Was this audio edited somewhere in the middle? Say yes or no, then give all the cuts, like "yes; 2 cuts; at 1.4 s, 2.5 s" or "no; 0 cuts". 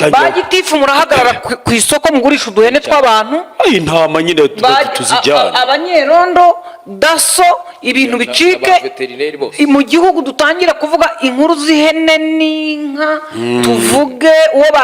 no; 0 cuts